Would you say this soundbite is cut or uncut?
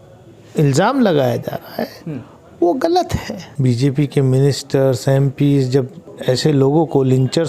cut